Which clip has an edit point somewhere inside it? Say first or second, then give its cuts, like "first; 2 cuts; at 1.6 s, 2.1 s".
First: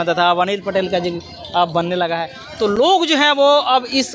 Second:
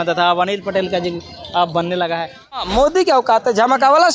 second; 1 cut; at 2.6 s